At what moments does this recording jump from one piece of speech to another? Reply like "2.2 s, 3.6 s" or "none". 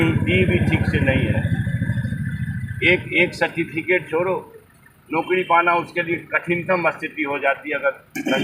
none